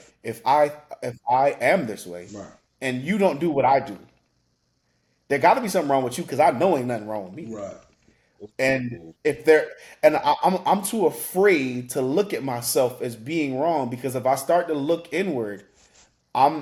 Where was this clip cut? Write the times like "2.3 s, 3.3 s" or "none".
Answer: none